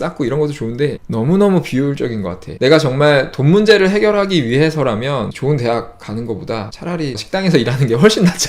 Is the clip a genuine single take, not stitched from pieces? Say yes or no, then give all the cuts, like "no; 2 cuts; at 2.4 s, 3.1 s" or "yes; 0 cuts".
no; 3 cuts; at 2.4 s, 5.3 s, 7.1 s